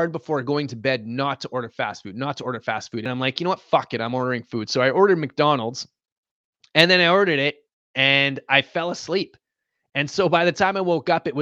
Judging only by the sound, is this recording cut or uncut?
cut